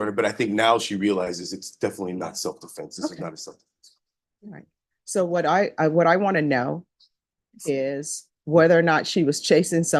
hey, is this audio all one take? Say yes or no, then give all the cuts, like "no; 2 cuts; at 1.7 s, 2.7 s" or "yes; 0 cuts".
yes; 0 cuts